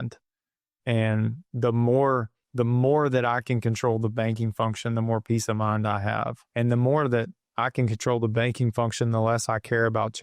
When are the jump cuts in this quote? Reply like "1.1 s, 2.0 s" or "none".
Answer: 2.4 s, 6.4 s